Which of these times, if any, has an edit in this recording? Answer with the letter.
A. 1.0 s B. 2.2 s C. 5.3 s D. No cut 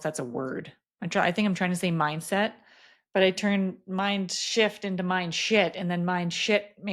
D